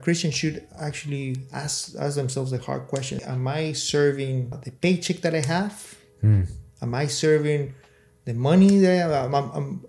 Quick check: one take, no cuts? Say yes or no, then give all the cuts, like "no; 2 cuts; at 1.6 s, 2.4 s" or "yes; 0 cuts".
no; 2 cuts; at 3.2 s, 4.6 s